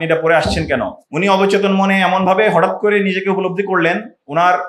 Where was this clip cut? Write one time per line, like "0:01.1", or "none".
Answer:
0:01.0